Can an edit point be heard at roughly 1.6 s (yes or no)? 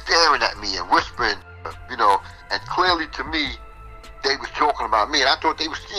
yes